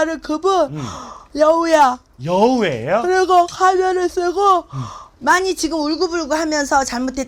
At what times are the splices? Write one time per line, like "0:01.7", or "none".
none